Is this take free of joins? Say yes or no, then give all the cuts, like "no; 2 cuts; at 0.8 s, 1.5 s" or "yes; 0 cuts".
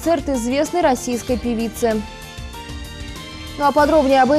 yes; 0 cuts